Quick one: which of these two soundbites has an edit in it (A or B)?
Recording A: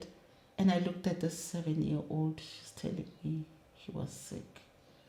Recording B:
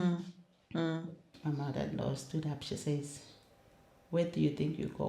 B